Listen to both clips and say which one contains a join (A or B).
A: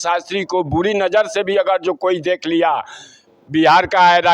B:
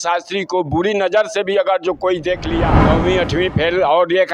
B